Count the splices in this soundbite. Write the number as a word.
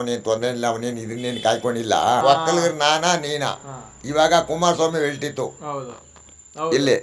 one